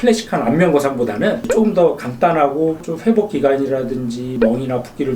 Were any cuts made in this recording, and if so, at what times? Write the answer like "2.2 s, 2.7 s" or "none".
2.8 s